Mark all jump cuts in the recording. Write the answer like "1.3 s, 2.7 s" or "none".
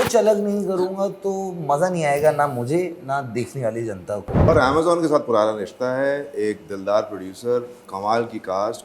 4.5 s